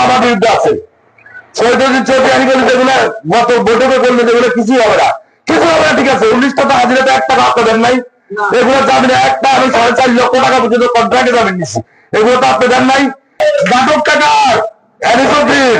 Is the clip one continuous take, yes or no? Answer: no